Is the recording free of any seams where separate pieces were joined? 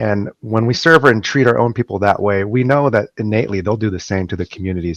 yes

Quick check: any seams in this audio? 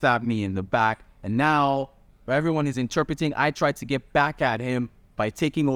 no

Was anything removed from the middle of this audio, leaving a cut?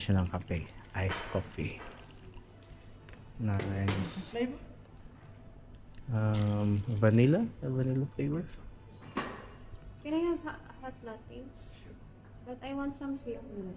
no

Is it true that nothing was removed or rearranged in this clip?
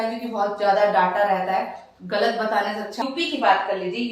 no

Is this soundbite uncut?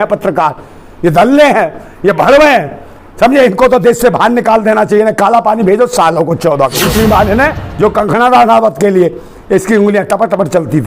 no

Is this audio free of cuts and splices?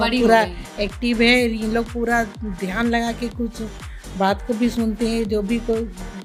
yes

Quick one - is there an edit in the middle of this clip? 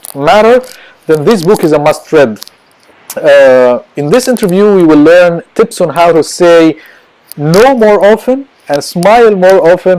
yes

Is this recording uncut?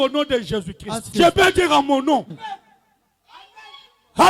yes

